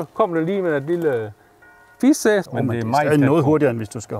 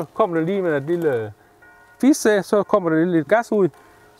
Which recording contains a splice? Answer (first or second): first